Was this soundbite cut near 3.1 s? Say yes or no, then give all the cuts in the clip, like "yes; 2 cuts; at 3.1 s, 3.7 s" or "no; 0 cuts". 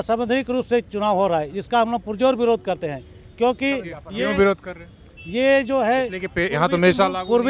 no; 0 cuts